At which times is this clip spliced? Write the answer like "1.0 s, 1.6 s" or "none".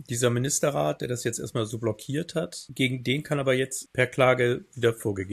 none